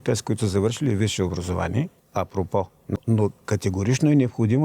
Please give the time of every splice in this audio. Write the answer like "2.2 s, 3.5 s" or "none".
2.0 s, 2.9 s